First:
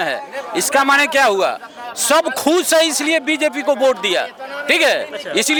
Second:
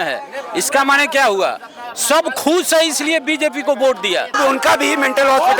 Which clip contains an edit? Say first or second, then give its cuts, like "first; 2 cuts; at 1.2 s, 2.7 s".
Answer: second; 1 cut; at 4.4 s